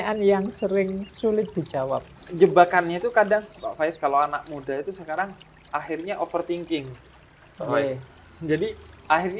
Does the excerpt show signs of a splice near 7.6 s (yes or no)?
no